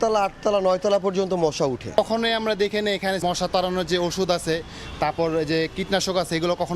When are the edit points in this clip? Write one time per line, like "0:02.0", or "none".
0:02.0
0:03.2